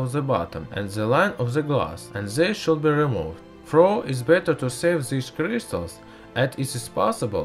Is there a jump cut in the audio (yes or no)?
yes